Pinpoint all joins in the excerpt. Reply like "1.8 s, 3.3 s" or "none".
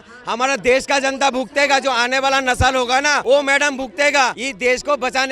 3.2 s, 4.4 s